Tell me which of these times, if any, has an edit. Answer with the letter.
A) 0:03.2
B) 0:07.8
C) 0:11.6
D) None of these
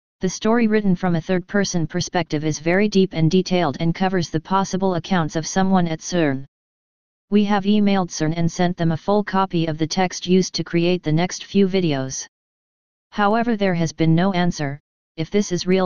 B